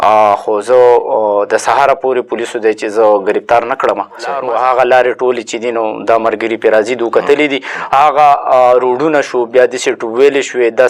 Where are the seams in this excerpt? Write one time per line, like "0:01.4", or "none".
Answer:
0:04.4

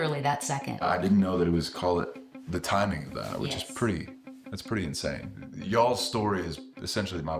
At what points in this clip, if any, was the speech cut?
0:00.8
0:05.4

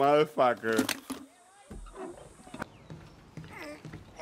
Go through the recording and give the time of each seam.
0:02.6

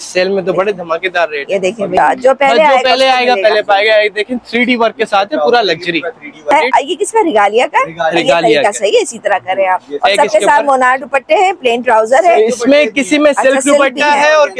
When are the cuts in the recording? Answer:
0:02.0
0:06.5

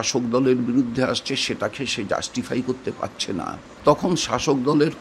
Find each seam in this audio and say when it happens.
0:03.7

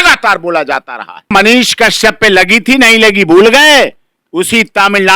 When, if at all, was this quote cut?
0:01.3

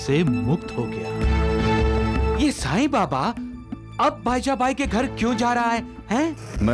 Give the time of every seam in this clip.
0:02.4

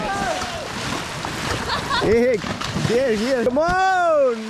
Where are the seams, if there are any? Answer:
0:03.4

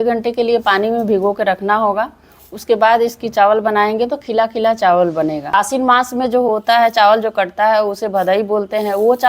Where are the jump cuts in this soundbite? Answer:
0:05.5

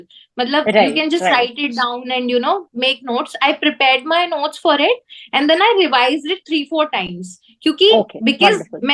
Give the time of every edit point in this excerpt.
none

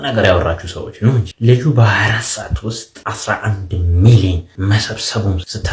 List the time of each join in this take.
0:01.3
0:02.9
0:04.5

